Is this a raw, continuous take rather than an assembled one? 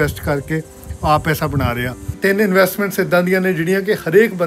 no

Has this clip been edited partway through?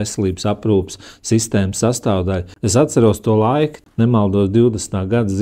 yes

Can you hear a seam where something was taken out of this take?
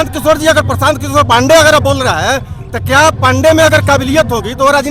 no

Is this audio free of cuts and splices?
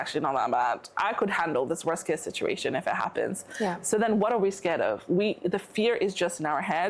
yes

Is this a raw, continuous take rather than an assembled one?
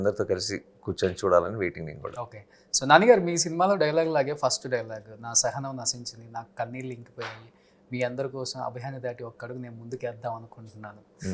yes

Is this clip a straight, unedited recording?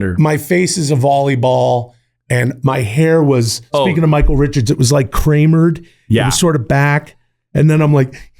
yes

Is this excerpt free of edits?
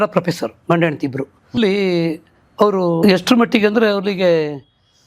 no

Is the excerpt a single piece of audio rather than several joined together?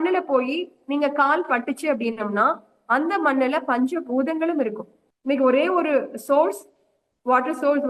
no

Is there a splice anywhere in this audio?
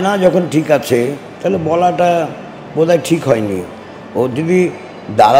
no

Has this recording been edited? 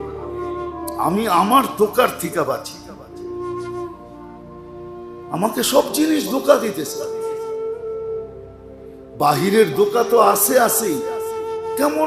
yes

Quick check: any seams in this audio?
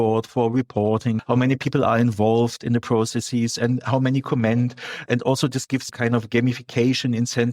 yes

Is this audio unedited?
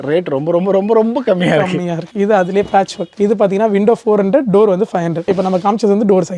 yes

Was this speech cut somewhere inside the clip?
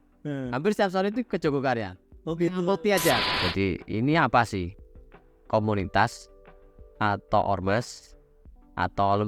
yes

